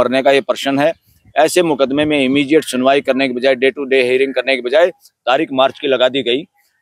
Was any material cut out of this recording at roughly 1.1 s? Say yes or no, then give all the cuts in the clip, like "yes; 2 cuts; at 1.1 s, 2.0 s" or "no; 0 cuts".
no; 0 cuts